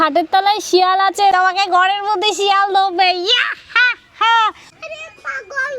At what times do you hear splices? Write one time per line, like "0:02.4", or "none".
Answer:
0:01.3
0:04.7

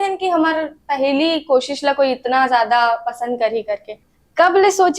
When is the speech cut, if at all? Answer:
0:04.0

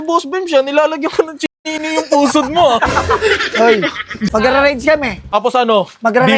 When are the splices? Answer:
0:04.3
0:05.3

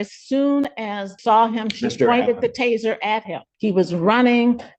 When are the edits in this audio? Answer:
0:01.1
0:03.5

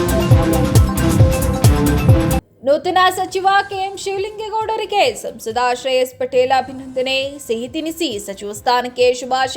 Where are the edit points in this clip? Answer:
0:02.4

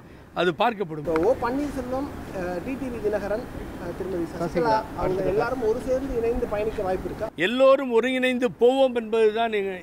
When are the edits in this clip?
0:01.0
0:07.2

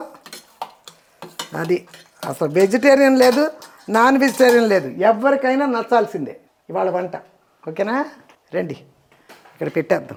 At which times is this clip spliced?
none

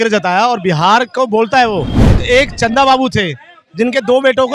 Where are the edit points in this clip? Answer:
0:02.2

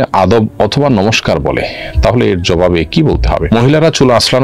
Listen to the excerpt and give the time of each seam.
0:03.5

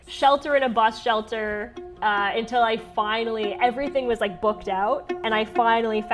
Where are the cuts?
0:05.2

